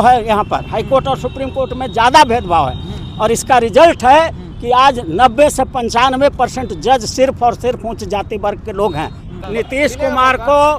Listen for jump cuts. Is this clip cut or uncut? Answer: cut